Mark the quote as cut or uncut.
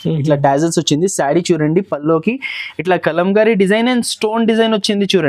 uncut